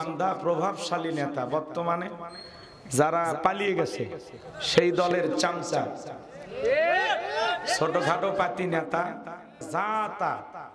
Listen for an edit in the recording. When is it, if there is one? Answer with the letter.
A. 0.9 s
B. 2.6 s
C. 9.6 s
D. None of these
C